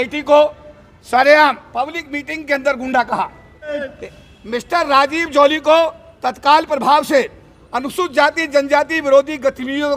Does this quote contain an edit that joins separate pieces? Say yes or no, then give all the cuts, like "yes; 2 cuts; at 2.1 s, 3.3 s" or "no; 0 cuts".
yes; 1 cut; at 3.9 s